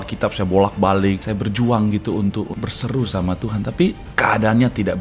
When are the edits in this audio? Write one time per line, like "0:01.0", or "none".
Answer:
0:01.2
0:02.5
0:04.0